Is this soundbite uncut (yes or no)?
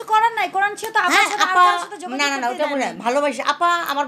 yes